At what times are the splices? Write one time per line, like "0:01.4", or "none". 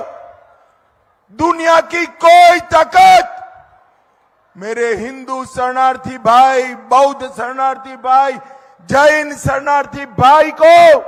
none

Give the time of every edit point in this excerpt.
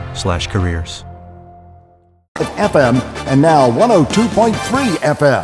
0:02.4

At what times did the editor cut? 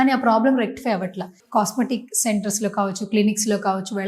0:01.4

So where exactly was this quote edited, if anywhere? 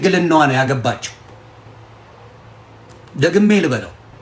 none

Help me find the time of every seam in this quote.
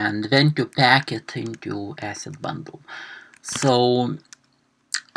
0:02.0

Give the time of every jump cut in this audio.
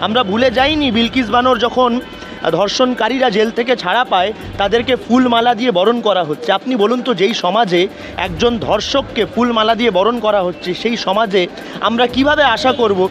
none

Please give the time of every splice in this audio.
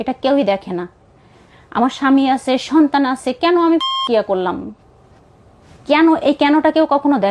0:04.7

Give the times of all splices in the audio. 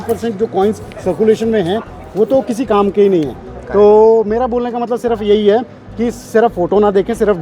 none

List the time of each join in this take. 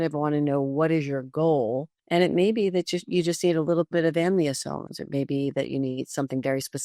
0:01.9

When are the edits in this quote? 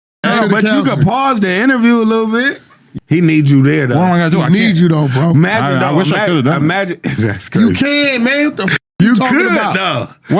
0:02.7

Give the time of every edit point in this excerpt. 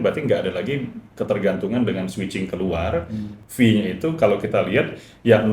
0:03.3

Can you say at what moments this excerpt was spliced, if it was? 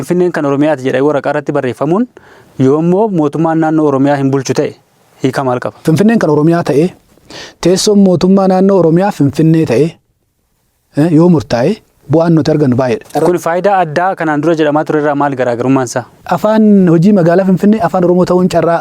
0:05.8
0:13.1
0:16.2

